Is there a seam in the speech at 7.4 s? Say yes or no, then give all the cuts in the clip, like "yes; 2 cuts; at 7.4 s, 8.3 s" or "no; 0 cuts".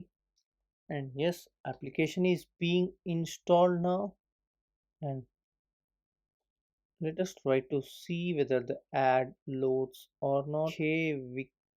no; 1 cut; at 10.7 s